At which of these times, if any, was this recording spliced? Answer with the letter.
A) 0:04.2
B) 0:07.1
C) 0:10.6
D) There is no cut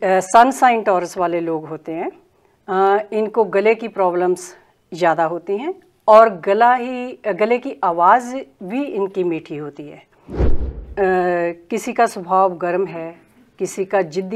C